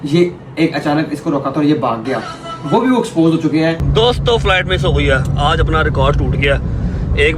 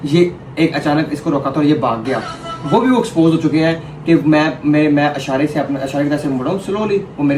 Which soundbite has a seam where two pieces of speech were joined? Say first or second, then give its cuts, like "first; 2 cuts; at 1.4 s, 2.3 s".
first; 1 cut; at 3.8 s